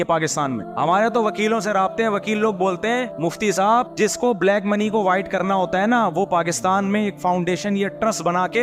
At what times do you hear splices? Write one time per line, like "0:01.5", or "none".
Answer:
none